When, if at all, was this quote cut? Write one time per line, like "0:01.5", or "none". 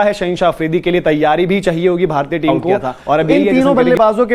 0:03.4